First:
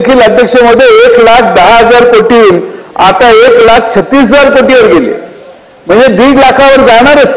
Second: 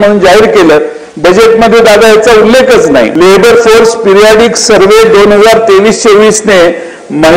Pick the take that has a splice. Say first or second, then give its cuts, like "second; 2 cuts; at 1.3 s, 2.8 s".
second; 1 cut; at 3.1 s